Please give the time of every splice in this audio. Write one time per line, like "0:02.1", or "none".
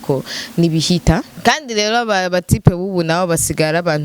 0:01.3